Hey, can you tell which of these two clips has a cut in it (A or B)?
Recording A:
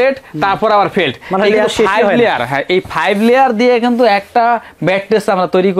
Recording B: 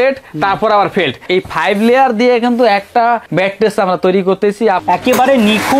B